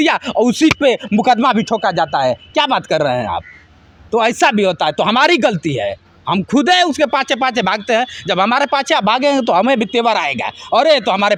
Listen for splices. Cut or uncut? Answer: uncut